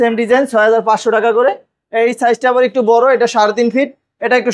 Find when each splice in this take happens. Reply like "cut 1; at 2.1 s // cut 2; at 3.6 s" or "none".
none